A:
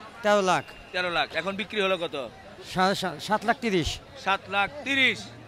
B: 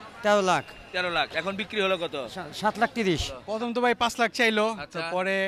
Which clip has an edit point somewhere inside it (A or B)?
B